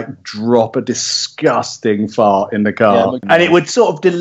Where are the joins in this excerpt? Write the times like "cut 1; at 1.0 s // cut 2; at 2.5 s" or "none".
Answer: cut 1; at 3.2 s